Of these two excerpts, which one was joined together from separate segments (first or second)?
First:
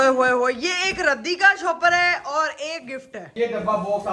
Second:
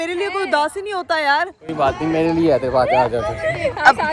first